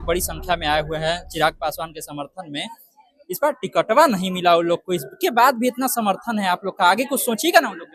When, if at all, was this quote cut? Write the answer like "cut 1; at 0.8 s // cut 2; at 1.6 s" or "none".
none